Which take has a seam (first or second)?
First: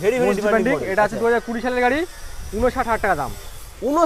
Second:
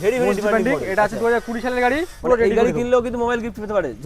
second